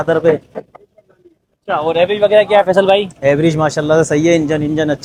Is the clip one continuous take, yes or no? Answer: yes